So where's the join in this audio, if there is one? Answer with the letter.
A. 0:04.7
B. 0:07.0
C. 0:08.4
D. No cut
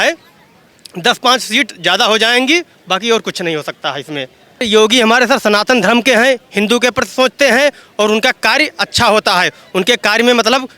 A